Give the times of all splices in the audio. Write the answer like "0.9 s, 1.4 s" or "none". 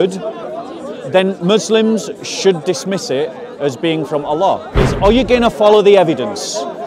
4.9 s

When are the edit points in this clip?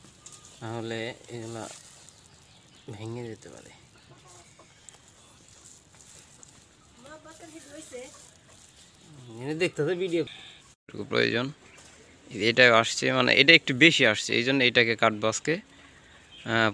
11.0 s

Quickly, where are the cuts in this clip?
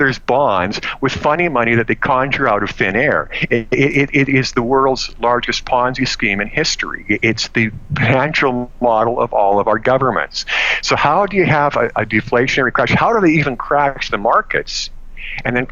none

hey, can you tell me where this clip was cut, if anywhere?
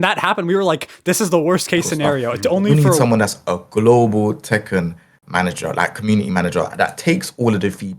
3.0 s

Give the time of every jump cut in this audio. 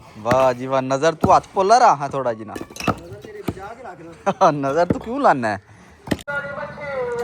6.3 s

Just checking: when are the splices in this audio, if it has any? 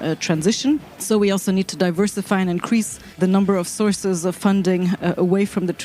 0.9 s, 3.2 s

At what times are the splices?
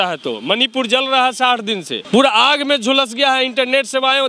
2.0 s

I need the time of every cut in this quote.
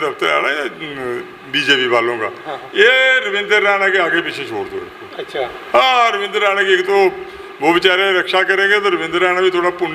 none

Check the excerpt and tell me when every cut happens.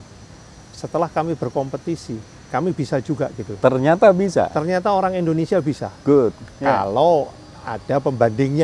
none

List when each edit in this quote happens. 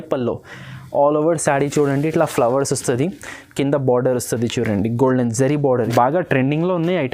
5.9 s

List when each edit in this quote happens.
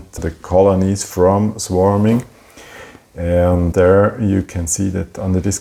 none

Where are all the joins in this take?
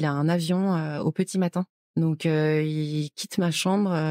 none

